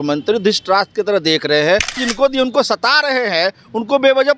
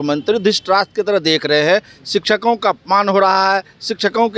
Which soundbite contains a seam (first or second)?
first